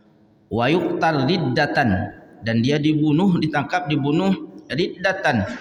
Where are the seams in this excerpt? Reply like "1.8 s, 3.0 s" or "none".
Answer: none